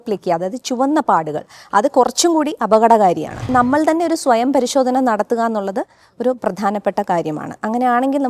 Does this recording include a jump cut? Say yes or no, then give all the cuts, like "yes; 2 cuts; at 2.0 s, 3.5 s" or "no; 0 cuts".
yes; 1 cut; at 3.5 s